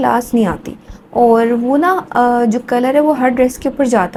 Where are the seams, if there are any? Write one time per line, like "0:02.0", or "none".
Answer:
none

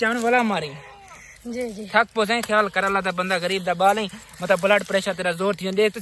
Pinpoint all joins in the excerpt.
none

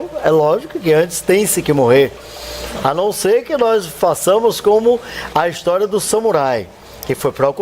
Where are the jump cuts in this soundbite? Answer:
0:01.0

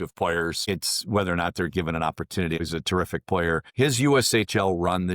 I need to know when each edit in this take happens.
0:00.7
0:02.6
0:03.7

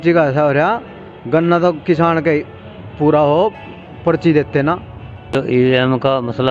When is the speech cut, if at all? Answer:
0:05.4

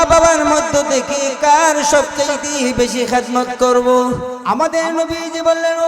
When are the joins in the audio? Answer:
0:04.3

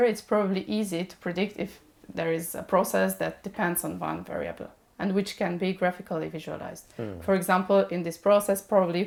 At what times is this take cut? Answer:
none

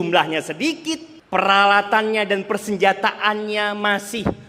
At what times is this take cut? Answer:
0:01.1

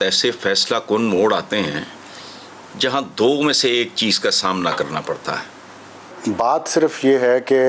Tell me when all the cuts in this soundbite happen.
0:06.1

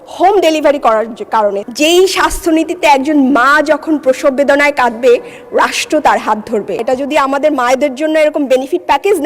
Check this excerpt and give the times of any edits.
0:01.6
0:06.8

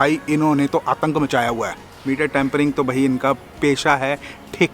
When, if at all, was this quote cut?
0:01.9

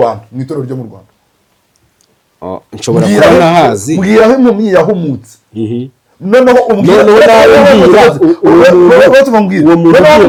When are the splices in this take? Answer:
none

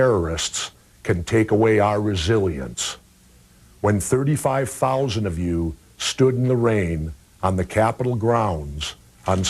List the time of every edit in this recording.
0:07.8

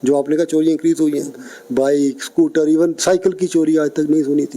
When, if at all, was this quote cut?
0:03.0

